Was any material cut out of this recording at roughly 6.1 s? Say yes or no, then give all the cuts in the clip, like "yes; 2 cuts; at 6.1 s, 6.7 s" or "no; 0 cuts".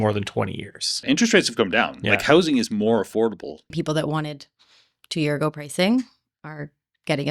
no; 2 cuts; at 1.0 s, 3.7 s